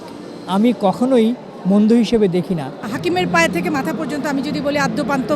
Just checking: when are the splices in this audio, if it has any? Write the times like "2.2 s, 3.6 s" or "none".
2.8 s